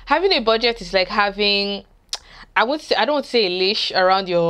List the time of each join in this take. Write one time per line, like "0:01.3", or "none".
none